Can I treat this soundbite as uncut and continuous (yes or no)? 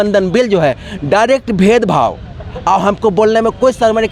yes